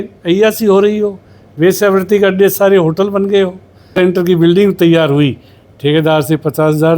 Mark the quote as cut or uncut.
cut